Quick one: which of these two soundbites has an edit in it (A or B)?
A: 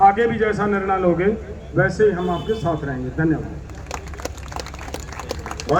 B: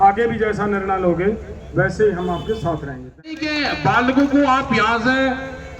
B